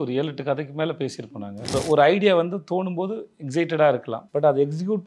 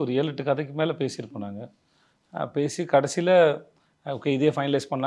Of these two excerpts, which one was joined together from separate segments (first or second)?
first